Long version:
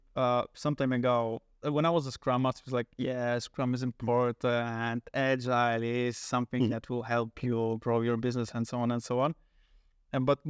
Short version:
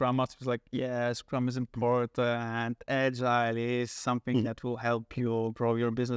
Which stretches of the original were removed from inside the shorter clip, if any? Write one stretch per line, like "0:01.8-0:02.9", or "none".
none